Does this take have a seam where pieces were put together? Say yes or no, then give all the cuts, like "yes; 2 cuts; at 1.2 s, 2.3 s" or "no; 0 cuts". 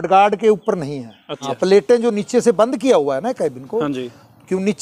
yes; 1 cut; at 1.4 s